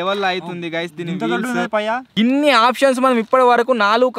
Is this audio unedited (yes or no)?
no